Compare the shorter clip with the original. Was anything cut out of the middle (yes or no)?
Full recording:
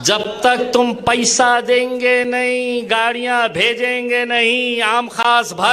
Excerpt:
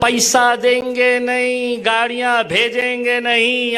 no